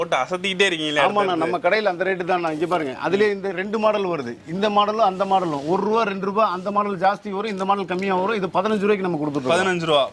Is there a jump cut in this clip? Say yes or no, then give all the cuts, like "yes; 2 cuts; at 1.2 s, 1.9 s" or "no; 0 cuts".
no; 0 cuts